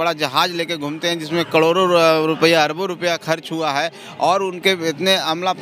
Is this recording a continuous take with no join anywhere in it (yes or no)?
yes